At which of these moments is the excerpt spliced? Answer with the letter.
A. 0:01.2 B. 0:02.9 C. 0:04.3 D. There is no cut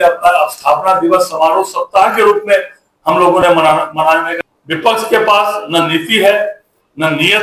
C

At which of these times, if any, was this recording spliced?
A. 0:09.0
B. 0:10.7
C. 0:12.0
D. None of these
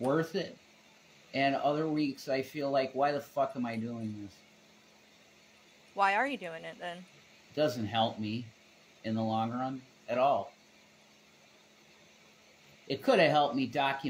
C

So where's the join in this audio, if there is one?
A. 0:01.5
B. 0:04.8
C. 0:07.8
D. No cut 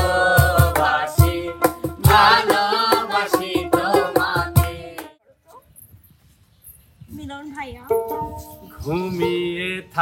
B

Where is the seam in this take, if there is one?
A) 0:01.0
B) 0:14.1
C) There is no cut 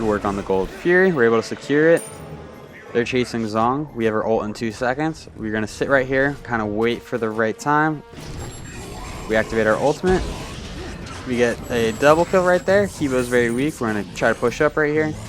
B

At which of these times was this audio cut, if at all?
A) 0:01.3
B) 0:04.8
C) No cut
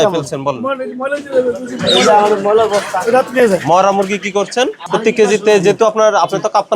B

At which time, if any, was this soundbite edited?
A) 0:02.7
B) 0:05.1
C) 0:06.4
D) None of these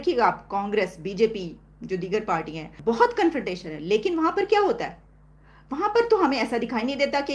A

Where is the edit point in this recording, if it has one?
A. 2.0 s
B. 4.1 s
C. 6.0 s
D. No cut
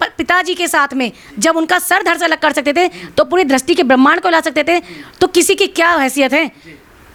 D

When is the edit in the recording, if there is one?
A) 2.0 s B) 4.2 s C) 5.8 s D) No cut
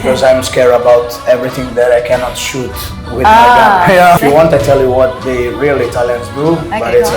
B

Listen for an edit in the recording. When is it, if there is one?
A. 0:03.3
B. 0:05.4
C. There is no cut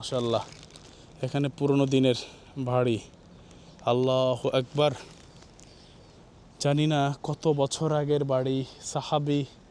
C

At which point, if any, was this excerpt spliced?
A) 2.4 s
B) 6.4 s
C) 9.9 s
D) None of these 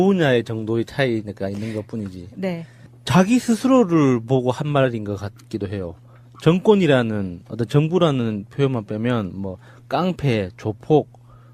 B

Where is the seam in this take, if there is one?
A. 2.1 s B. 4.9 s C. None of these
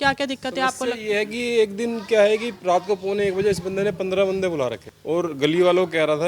B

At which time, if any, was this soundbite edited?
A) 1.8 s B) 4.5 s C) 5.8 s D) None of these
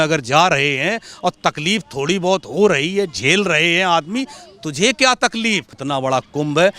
C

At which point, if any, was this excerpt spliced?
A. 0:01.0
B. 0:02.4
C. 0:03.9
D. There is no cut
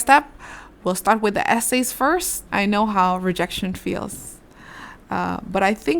B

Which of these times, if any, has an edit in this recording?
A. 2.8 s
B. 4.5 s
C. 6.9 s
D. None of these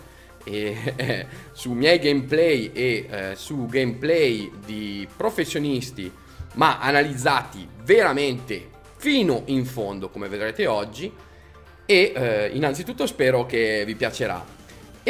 D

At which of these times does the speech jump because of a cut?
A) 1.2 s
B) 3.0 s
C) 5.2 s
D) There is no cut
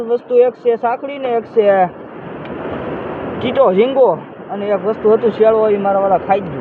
D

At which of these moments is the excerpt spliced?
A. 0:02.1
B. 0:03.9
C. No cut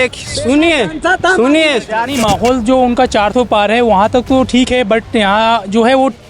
A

